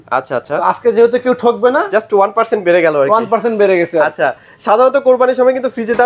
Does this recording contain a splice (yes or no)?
no